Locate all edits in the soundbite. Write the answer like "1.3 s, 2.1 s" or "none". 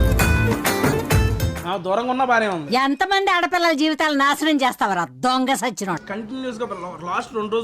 6.0 s